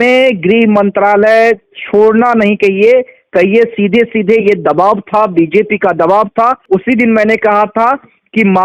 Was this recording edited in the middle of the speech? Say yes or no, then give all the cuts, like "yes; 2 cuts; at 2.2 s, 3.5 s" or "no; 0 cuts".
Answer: yes; 1 cut; at 6.6 s